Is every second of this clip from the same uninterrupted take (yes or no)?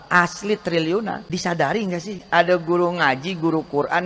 no